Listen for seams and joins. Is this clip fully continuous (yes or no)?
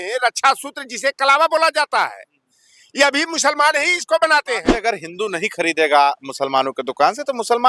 no